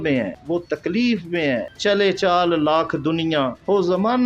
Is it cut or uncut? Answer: cut